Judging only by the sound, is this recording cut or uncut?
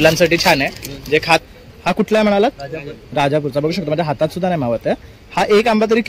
cut